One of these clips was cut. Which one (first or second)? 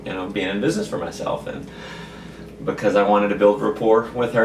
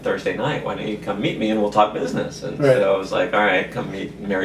second